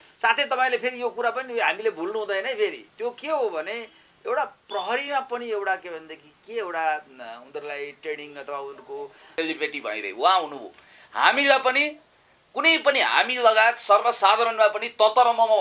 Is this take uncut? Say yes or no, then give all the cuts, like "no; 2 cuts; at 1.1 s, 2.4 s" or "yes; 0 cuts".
no; 1 cut; at 9.3 s